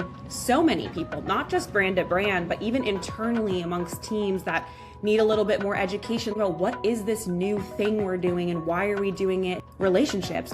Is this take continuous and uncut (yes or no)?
no